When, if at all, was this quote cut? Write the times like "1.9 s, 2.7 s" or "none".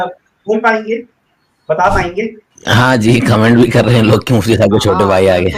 2.5 s